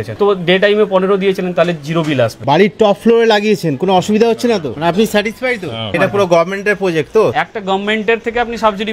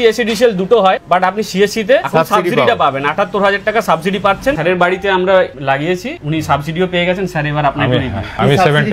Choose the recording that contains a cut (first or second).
first